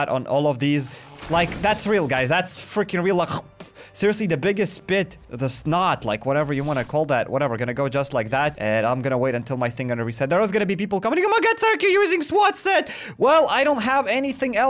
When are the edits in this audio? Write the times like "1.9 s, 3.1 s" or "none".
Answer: none

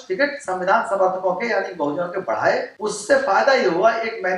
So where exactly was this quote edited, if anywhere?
2.7 s

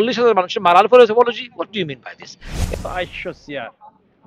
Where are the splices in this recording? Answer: 2.7 s

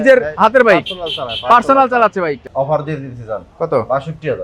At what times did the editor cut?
2.5 s

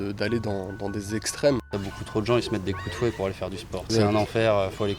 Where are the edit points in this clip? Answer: 1.7 s, 3.9 s

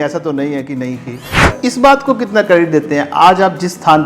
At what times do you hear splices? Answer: 1.4 s

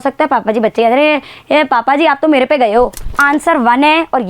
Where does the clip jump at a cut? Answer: 3.0 s

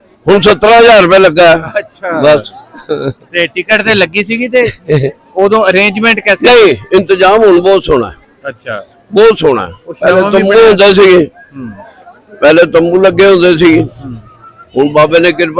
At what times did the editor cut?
none

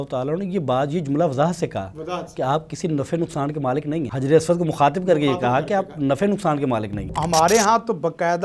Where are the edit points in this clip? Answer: 4.1 s, 7.1 s

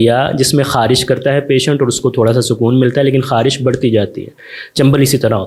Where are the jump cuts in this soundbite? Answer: none

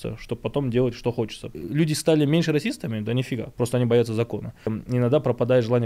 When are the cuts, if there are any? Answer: 1.4 s, 4.7 s

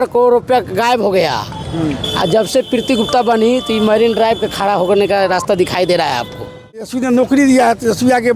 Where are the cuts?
6.8 s

